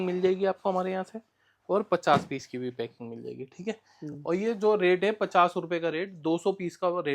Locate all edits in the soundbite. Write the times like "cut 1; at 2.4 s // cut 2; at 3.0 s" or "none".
none